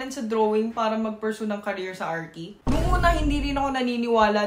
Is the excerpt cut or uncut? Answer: uncut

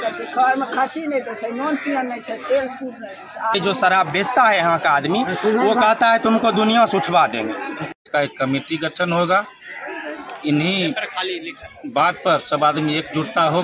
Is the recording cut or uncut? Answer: cut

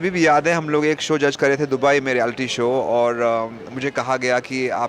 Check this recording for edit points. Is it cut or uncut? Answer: uncut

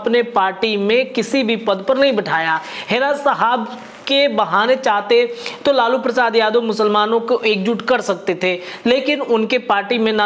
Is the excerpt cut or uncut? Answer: uncut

